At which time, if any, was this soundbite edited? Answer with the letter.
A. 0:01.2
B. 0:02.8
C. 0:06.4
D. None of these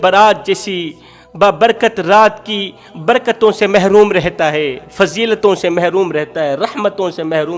D